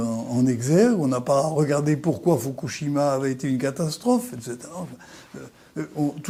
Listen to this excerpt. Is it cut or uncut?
uncut